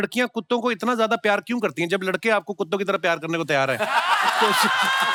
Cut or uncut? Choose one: uncut